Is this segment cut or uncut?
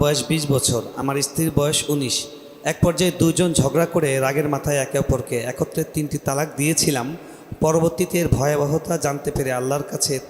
uncut